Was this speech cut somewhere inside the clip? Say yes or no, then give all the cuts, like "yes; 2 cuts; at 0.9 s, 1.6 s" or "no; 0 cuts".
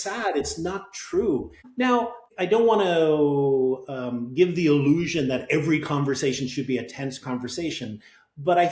no; 0 cuts